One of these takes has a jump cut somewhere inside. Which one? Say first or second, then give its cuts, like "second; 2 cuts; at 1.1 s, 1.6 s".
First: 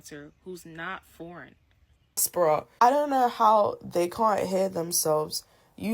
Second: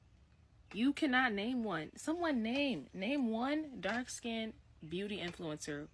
first; 1 cut; at 2.3 s